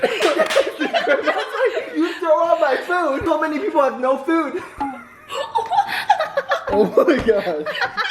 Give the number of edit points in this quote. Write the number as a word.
one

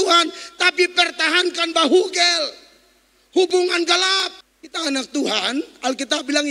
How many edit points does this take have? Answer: zero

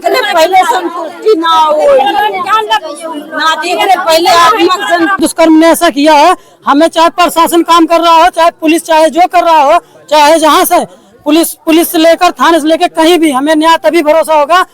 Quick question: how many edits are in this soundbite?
one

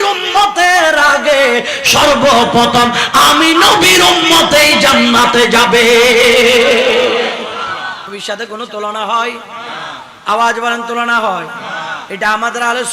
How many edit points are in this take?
one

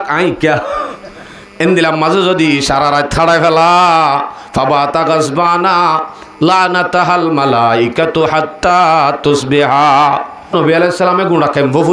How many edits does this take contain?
one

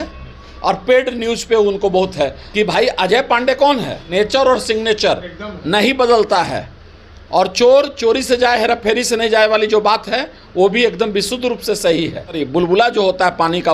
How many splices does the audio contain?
three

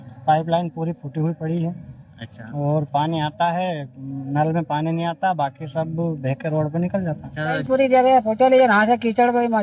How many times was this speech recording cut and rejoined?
two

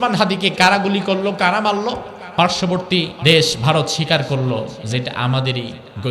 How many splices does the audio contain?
two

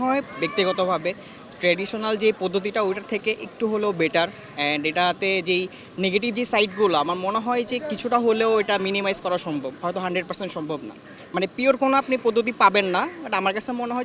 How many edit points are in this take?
zero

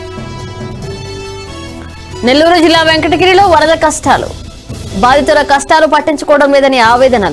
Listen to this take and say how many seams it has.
zero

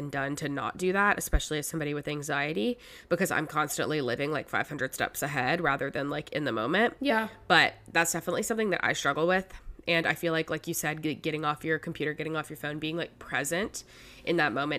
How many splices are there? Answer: zero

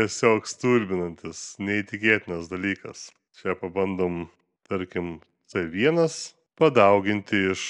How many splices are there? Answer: zero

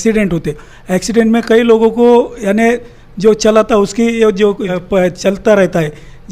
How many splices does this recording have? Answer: one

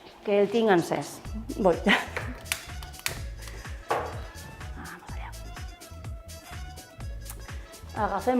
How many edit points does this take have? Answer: one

